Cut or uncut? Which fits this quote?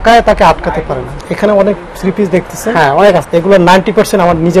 cut